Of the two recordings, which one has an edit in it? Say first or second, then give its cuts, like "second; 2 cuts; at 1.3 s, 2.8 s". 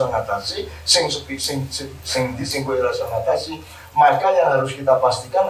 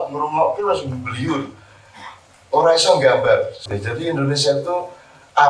second; 1 cut; at 3.6 s